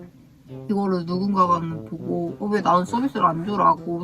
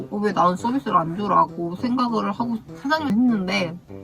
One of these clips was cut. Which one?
second; 1 cut; at 3.1 s

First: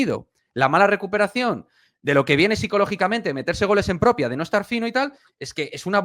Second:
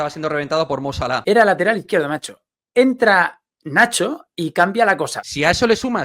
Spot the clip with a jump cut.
second; 2 cuts; at 1.2 s, 5.2 s

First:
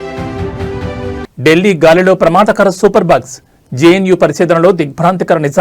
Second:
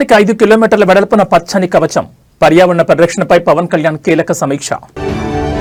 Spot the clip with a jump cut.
first; 1 cut; at 1.2 s

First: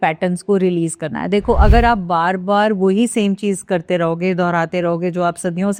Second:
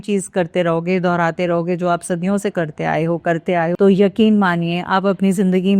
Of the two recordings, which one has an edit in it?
second; 1 cut; at 3.7 s

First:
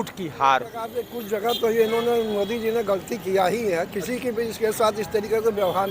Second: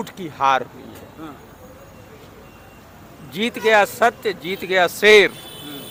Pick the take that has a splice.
first; 1 cut; at 1.1 s

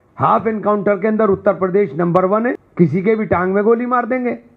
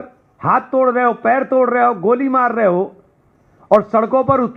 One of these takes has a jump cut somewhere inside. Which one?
first; 1 cut; at 2.6 s

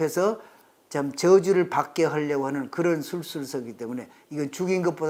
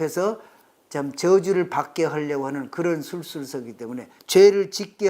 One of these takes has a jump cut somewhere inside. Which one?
second; 1 cut; at 4.2 s

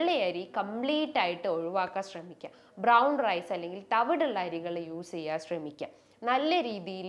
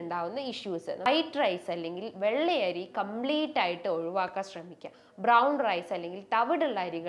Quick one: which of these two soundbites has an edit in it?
second; 1 cut; at 1.1 s

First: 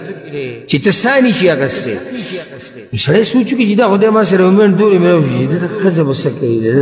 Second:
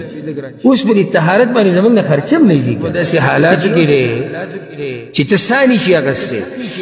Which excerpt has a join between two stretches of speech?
second; 1 cut; at 3.0 s

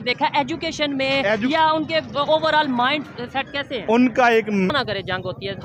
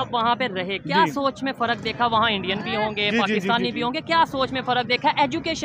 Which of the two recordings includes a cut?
first; 1 cut; at 4.7 s

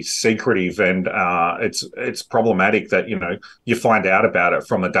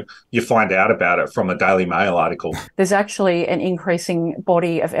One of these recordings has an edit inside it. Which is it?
second; 1 cut; at 2.6 s

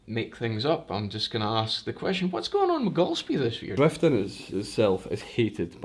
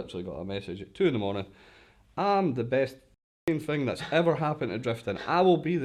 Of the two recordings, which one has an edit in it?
first; 1 cut; at 3.6 s

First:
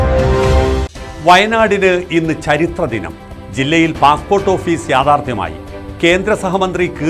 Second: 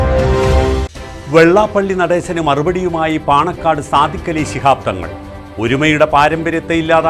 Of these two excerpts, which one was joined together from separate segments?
first; 1 cut; at 1.0 s

